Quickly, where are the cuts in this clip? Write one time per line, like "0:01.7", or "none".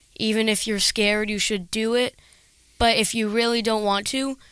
none